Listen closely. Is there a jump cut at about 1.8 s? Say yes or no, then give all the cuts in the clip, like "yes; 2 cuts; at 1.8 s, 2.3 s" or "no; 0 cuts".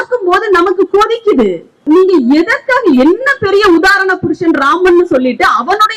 yes; 1 cut; at 1.8 s